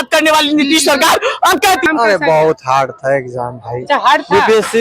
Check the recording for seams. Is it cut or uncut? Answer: cut